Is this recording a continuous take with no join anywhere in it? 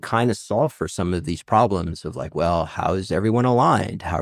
no; 1 cut; at 3.1 s

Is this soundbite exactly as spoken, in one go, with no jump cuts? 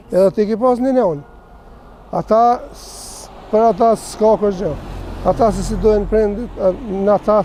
yes; 0 cuts

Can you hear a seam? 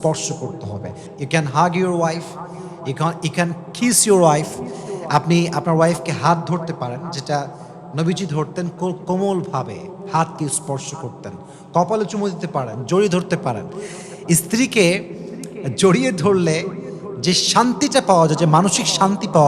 yes; 1 cut; at 1.1 s

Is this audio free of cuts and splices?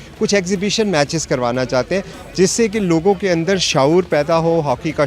yes; 0 cuts

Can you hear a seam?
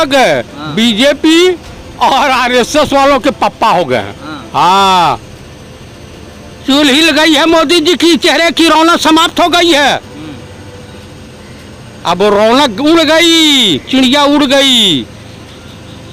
no; 0 cuts

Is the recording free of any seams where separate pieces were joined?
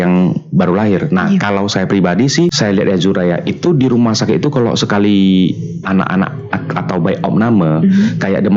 no; 1 cut; at 2.5 s

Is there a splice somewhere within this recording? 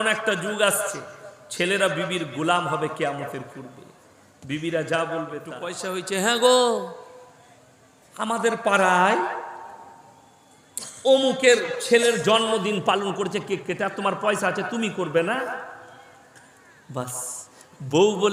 yes; 1 cut; at 5.8 s

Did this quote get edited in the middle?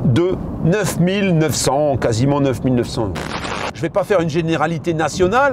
yes; 1 cut; at 3.6 s

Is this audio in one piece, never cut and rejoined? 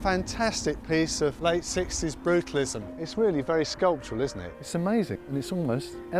no; 2 cuts; at 1.4 s, 4.6 s

